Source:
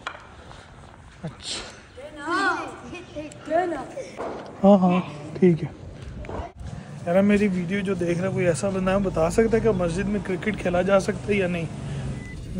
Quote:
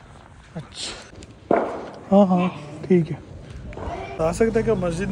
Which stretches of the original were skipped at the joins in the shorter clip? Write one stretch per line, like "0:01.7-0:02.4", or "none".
0:02.1-0:04.0
0:06.7-0:09.1